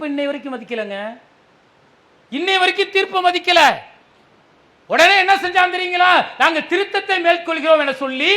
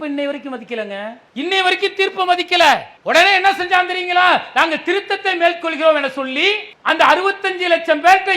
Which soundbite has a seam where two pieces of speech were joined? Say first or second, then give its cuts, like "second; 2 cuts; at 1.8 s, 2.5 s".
second; 3 cuts; at 1.2 s, 2.9 s, 6.7 s